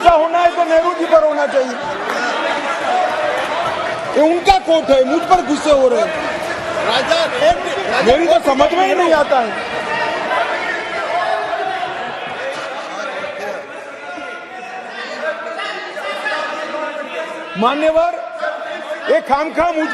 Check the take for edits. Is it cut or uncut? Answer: uncut